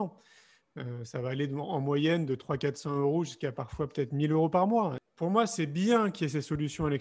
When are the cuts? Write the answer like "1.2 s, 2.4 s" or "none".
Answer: 5.0 s